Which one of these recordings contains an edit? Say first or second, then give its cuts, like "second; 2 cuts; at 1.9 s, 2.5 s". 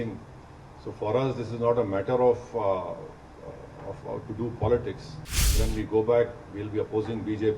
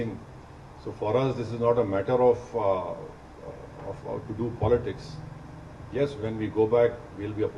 first; 1 cut; at 5.5 s